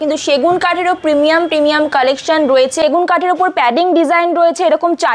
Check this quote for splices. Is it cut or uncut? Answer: cut